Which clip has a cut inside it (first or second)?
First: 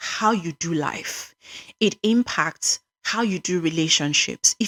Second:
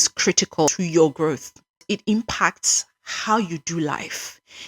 second